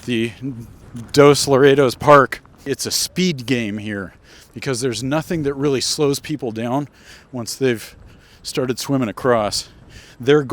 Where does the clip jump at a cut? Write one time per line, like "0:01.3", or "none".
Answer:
0:02.7